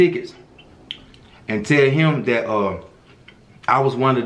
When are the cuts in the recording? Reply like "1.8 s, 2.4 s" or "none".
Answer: none

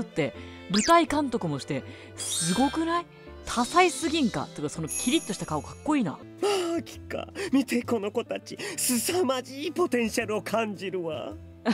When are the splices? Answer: 6.2 s

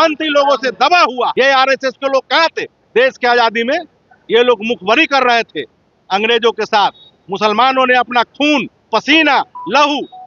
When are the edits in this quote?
1.3 s

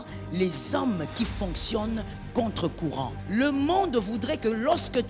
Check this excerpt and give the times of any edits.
3.2 s

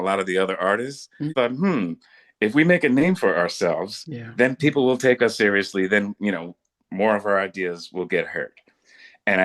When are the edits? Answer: 1.3 s

